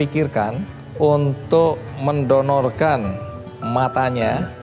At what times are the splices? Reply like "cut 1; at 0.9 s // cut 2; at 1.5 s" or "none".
none